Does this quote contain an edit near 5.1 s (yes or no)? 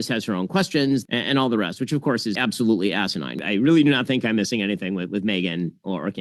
no